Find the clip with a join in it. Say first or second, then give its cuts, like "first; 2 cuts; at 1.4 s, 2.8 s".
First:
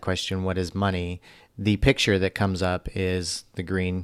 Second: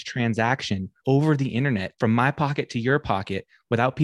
second; 2 cuts; at 0.9 s, 1.9 s